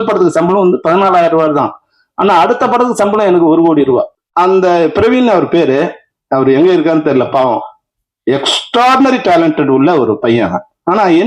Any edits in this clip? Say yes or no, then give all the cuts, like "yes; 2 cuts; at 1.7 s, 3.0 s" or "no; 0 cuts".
yes; 1 cut; at 4.2 s